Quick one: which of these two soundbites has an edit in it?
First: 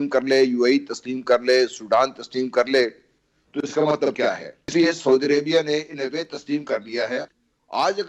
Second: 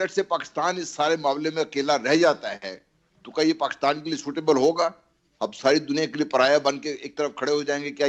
first; 2 cuts; at 4.2 s, 7.3 s

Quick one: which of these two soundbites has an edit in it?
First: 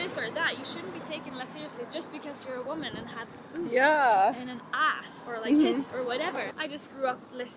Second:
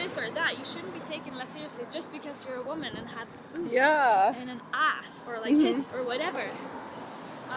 first; 1 cut; at 6.5 s

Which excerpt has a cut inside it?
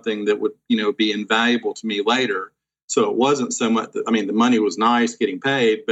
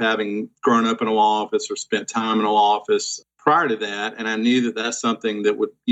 second; 1 cut; at 3.2 s

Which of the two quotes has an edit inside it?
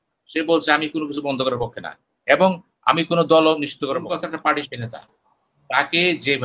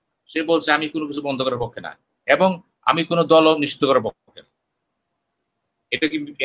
first; 1 cut; at 4.0 s

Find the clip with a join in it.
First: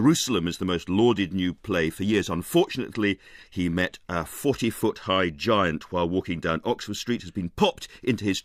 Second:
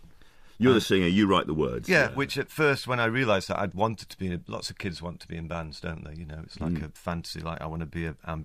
first; 1 cut; at 5.8 s

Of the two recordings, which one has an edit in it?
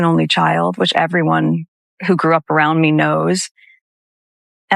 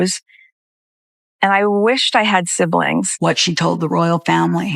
second; 1 cut; at 2.9 s

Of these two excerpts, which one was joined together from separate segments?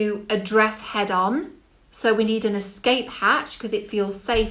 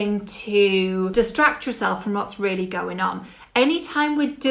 second; 1 cut; at 1.1 s

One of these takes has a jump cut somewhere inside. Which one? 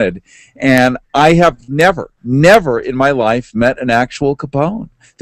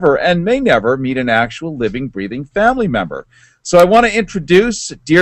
second; 1 cut; at 1.5 s

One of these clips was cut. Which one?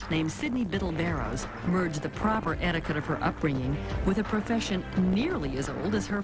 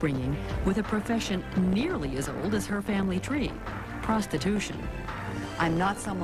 first; 1 cut; at 2.3 s

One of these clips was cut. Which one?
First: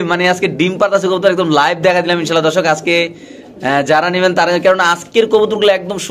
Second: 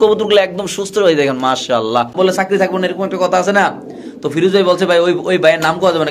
second; 1 cut; at 2.1 s

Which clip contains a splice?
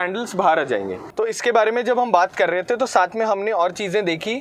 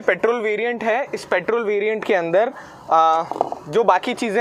first; 1 cut; at 1.0 s

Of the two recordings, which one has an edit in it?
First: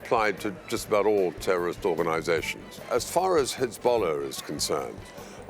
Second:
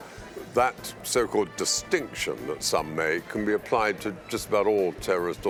first; 1 cut; at 2.9 s

